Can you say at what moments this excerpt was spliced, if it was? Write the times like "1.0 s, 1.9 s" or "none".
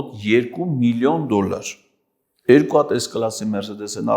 none

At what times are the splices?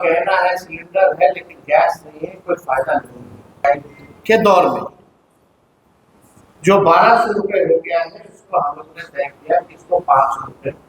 3.6 s

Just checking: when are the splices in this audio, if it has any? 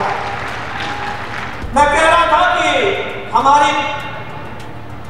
1.6 s

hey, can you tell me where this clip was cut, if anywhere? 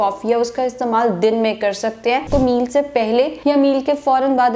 2.3 s, 3.3 s

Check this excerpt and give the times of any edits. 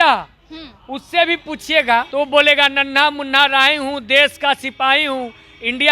2.1 s

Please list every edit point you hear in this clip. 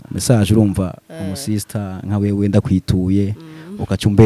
none

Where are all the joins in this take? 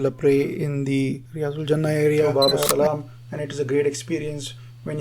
2.4 s

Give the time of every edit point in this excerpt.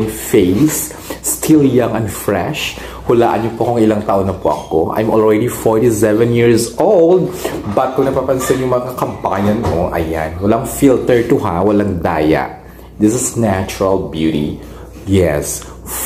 none

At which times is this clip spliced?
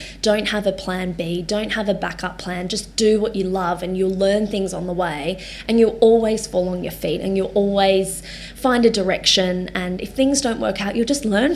none

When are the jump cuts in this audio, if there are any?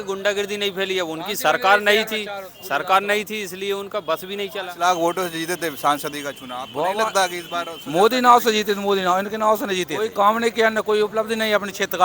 4.6 s, 10.0 s

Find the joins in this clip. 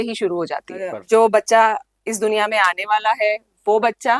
1.0 s

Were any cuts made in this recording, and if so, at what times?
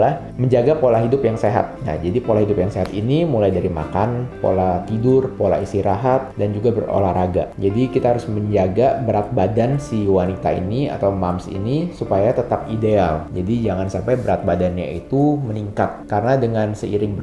none

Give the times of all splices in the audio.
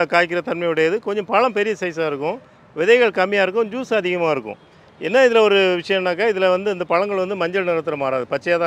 none

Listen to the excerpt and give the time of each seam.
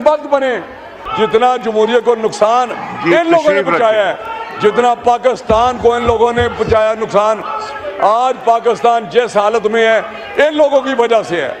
1.0 s

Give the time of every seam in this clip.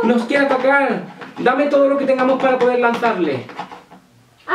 none

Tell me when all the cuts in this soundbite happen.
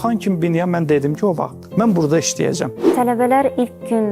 1.6 s, 2.8 s

